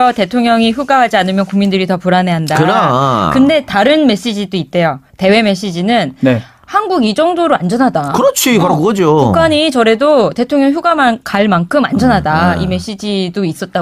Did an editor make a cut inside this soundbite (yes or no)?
no